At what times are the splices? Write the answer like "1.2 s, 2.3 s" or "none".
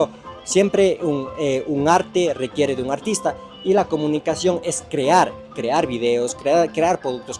none